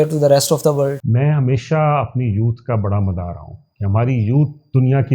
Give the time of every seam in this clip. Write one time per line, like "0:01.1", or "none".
0:01.0

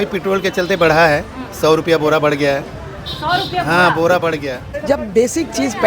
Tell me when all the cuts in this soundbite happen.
0:04.7

